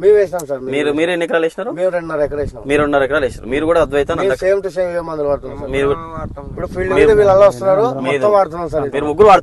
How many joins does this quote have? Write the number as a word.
zero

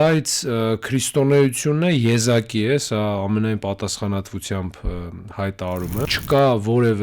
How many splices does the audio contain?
one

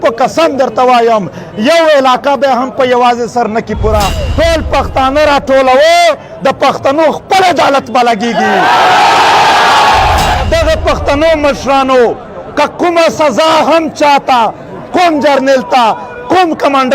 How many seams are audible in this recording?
two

